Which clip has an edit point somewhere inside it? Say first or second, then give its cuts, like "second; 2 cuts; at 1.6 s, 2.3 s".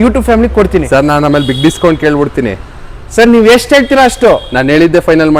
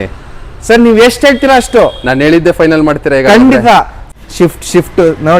second; 1 cut; at 4.0 s